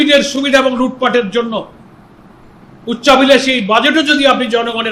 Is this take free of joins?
yes; 0 cuts

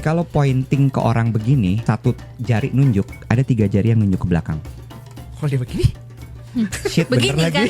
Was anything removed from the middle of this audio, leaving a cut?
yes; 2 cuts; at 1.8 s, 4.6 s

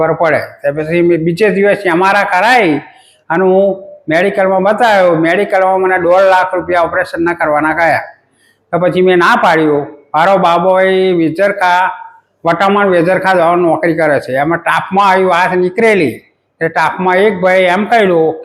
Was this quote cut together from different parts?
no; 0 cuts

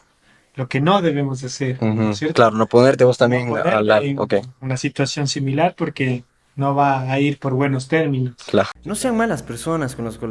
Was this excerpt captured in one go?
no; 1 cut; at 8.8 s

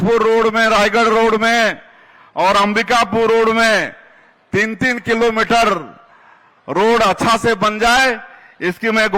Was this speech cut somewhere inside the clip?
no; 0 cuts

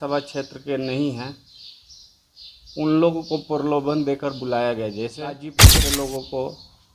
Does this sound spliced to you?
yes; 1 cut; at 5.8 s

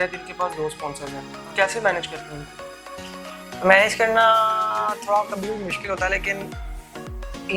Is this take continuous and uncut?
yes; 0 cuts

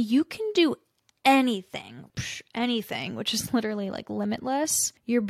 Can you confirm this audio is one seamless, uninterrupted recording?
no; 1 cut; at 2.0 s

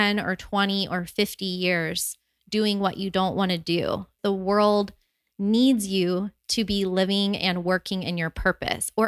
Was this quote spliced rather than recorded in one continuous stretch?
yes; 1 cut; at 4.2 s

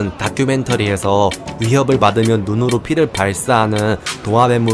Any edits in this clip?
no; 0 cuts

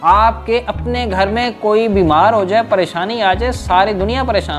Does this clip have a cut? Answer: no; 0 cuts

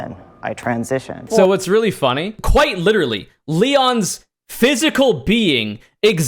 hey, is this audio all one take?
no; 2 cuts; at 1.2 s, 2.4 s

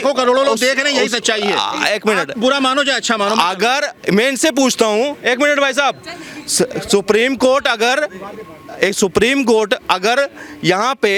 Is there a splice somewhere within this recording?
no; 0 cuts

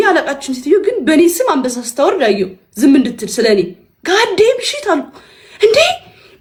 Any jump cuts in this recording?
no; 0 cuts

